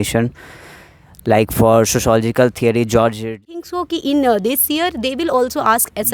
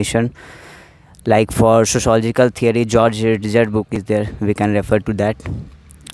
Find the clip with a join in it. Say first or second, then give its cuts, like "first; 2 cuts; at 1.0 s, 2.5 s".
first; 1 cut; at 3.4 s